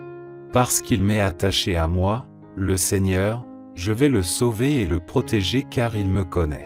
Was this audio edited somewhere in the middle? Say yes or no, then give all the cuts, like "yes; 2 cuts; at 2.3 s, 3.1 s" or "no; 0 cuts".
no; 0 cuts